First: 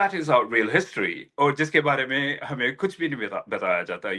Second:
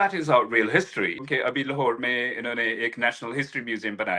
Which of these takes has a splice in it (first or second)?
second